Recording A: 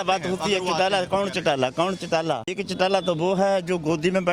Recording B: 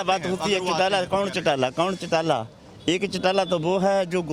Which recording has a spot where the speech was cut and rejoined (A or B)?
A